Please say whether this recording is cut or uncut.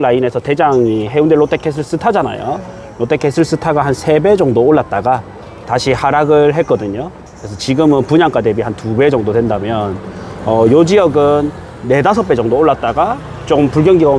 uncut